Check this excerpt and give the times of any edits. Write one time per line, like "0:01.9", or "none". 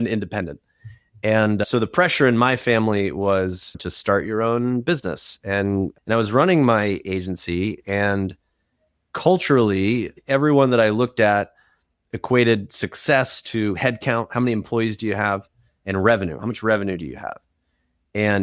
0:01.6
0:03.7
0:06.0
0:10.1